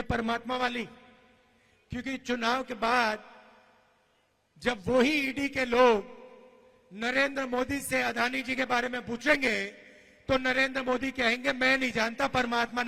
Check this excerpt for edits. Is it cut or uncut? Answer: uncut